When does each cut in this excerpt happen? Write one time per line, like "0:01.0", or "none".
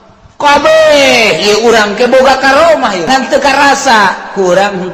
0:03.1